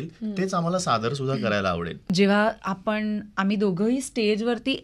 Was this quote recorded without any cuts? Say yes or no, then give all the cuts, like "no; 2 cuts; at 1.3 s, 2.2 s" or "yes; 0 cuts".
no; 1 cut; at 1.9 s